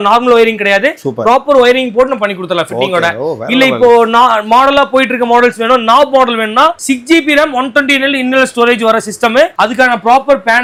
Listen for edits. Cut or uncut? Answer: uncut